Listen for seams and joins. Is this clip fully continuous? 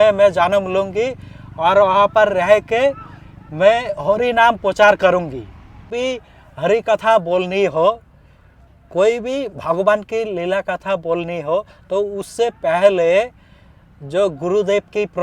no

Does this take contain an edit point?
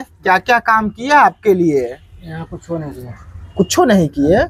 no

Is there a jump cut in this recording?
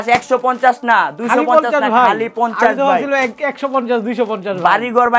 no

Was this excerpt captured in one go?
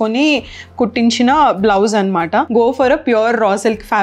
no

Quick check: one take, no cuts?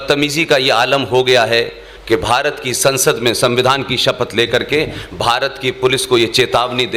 yes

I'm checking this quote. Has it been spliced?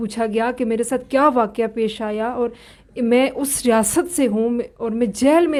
no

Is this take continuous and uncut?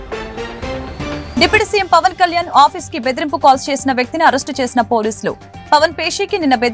no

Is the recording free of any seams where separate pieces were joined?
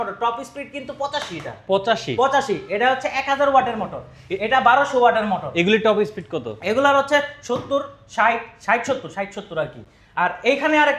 yes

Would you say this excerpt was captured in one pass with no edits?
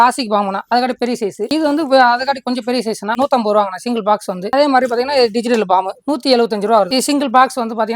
no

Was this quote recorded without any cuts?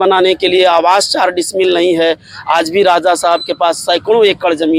yes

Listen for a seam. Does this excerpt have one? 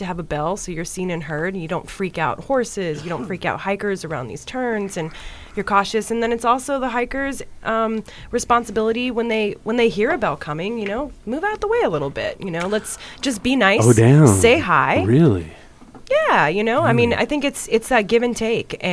no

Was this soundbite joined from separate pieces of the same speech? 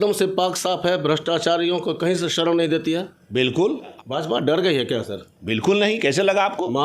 yes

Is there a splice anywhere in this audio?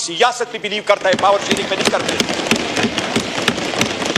no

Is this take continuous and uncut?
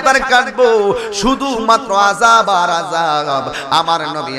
yes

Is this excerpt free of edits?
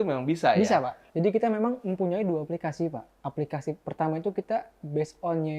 no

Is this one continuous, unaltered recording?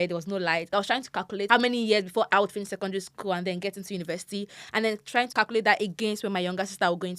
no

